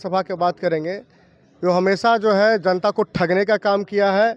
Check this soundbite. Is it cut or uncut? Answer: uncut